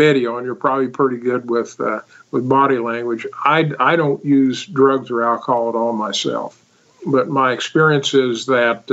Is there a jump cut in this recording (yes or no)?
yes